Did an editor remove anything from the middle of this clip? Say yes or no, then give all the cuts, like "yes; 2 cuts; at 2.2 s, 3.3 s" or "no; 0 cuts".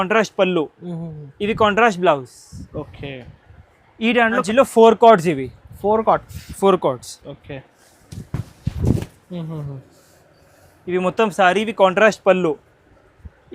yes; 1 cut; at 4.4 s